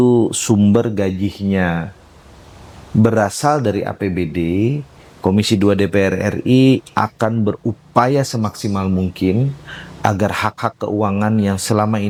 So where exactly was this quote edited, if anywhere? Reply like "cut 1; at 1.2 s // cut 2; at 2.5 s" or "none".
none